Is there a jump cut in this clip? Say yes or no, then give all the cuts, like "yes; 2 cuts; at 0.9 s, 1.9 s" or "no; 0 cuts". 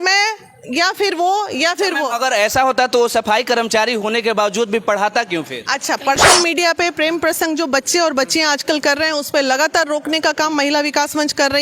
yes; 1 cut; at 6.2 s